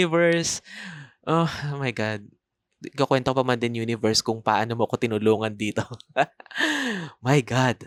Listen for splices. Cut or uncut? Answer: uncut